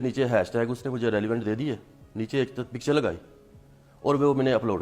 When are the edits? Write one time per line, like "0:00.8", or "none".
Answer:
none